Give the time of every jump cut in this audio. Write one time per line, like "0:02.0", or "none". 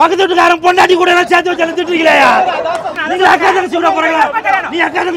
0:03.0